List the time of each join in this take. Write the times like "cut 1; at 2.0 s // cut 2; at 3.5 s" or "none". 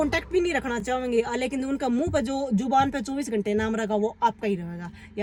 none